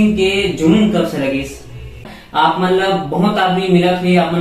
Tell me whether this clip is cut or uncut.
cut